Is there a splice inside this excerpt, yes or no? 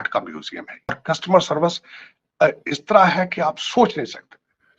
yes